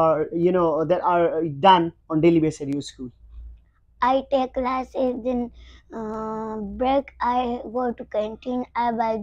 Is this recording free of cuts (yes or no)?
yes